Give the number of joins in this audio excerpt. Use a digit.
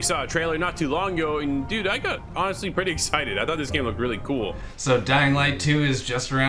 1